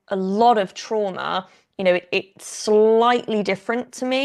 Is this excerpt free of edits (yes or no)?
yes